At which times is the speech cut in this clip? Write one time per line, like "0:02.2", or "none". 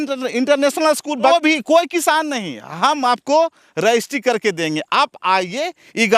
0:01.3